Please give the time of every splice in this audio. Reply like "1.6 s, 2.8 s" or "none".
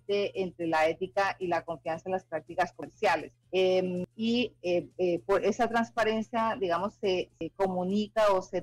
2.9 s, 4.1 s, 7.4 s